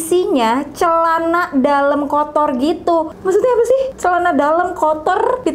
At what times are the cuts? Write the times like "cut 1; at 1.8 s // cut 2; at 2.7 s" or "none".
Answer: cut 1; at 3.1 s